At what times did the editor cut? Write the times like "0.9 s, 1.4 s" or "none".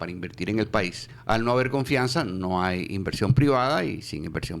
1.1 s